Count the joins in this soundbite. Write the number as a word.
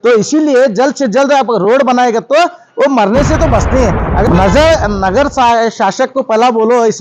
one